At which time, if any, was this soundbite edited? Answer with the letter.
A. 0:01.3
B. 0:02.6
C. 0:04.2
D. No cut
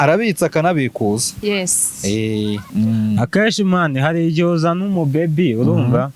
B